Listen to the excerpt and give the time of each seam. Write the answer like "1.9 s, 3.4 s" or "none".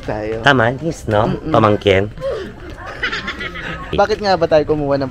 3.9 s